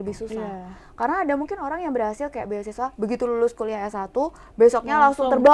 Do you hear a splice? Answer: no; 0 cuts

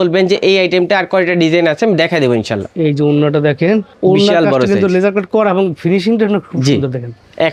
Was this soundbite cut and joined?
no; 0 cuts

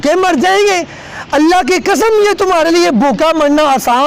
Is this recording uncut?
yes; 0 cuts

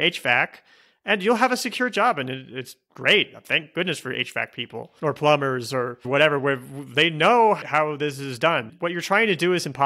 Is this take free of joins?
no; 1 cut; at 8.7 s

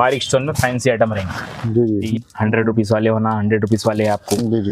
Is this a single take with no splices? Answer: no; 1 cut; at 2.0 s

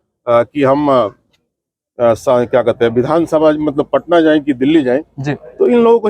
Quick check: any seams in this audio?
no; 0 cuts

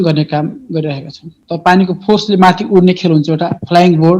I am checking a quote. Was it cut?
yes; 1 cut; at 1.4 s

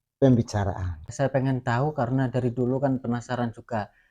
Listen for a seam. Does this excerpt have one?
yes; 1 cut; at 0.9 s

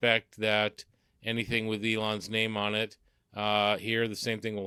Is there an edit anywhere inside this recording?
no; 0 cuts

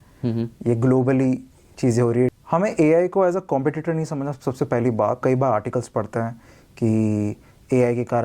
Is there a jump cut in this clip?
yes; 2 cuts; at 2.3 s, 5.2 s

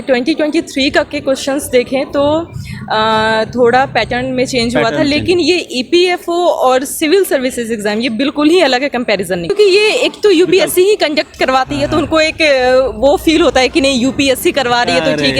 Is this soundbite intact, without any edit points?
no; 1 cut; at 9.5 s

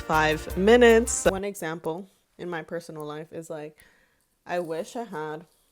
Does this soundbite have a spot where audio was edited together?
yes; 1 cut; at 1.3 s

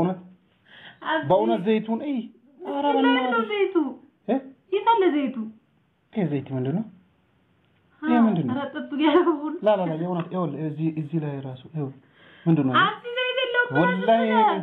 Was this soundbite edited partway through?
no; 0 cuts

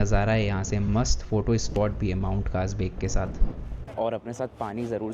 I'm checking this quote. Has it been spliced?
yes; 1 cut; at 3.8 s

